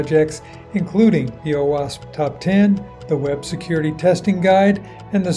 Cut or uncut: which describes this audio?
uncut